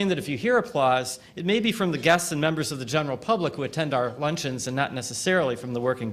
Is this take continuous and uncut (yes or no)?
yes